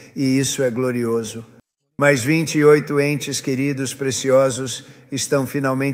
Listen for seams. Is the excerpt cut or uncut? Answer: uncut